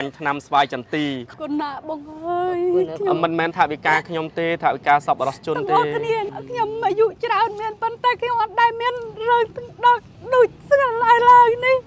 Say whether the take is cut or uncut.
cut